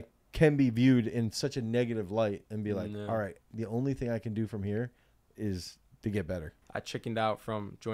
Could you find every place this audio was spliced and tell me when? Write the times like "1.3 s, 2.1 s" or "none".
6.6 s